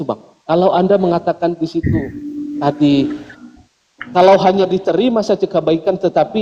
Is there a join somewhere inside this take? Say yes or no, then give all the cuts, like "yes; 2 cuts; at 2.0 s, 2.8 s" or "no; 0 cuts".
no; 0 cuts